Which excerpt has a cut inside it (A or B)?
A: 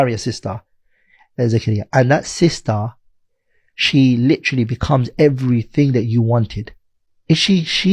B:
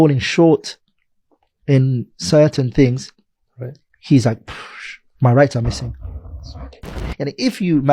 B